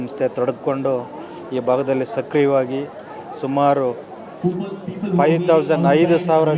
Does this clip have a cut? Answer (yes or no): no